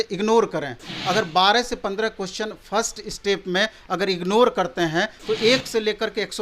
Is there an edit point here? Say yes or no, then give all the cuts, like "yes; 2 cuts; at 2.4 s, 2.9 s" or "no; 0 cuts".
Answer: yes; 1 cut; at 5.2 s